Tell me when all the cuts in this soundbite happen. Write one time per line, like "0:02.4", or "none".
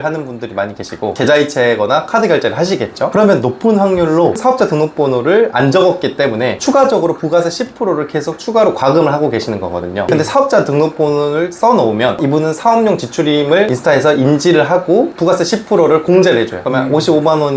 none